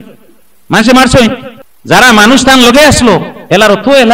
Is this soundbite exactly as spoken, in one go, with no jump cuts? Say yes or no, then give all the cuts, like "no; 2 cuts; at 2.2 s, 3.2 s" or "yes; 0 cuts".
no; 1 cut; at 1.5 s